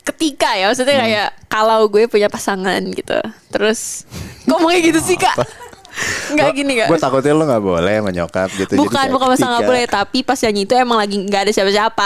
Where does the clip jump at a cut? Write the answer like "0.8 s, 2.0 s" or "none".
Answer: none